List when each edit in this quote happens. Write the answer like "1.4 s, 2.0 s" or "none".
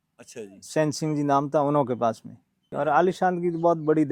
2.6 s